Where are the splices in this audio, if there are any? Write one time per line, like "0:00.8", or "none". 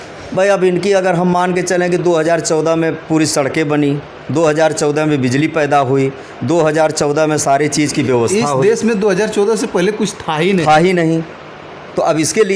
none

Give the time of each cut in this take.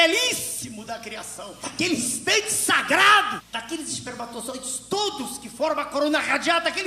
0:01.5

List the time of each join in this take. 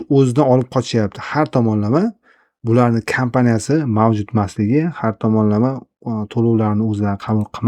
none

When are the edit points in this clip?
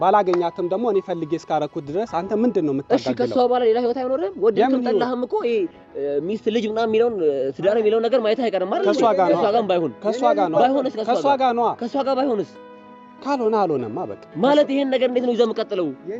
none

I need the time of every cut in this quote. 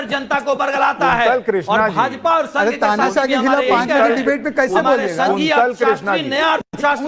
none

